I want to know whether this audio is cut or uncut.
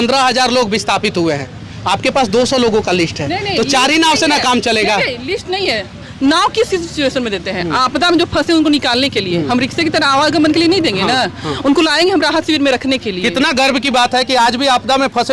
uncut